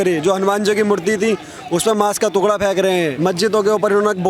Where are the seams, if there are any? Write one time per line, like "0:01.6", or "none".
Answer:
0:03.1